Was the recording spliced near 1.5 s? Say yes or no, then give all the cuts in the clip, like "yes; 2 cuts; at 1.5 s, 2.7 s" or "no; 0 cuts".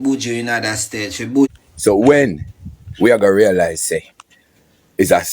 yes; 1 cut; at 1.5 s